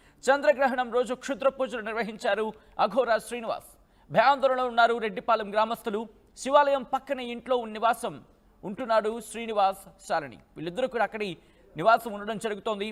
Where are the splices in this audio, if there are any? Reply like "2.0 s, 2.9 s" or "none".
none